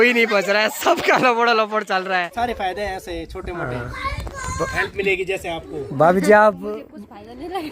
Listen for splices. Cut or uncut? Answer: cut